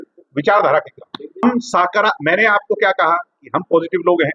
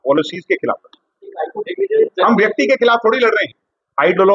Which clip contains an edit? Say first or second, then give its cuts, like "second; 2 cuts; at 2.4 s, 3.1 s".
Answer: first; 1 cut; at 1.4 s